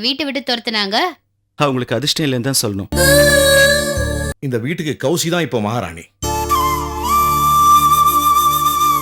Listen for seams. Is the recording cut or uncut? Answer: cut